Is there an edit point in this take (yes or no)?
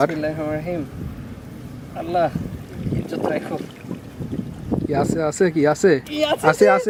no